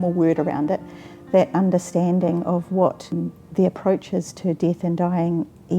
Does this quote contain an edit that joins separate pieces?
yes; 1 cut; at 3.1 s

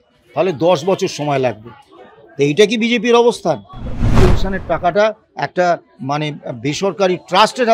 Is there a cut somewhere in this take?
yes; 1 cut; at 4.2 s

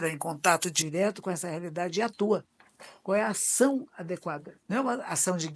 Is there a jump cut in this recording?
yes; 1 cut; at 4.5 s

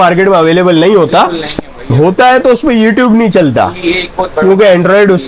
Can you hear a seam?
no; 0 cuts

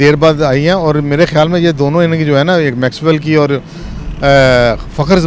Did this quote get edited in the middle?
no; 0 cuts

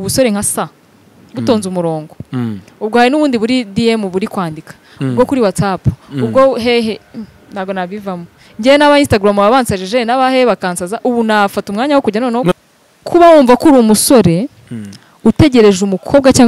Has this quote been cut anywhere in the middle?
yes; 1 cut; at 12.5 s

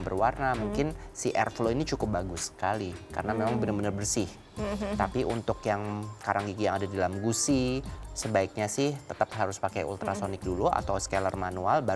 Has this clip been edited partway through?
no; 0 cuts

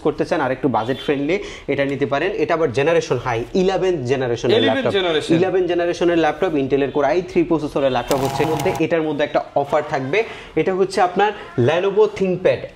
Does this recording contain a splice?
yes; 1 cut; at 8.5 s

